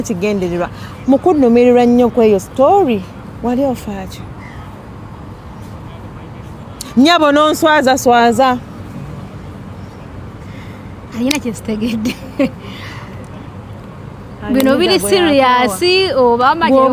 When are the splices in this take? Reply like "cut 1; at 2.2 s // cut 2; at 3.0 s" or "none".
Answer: none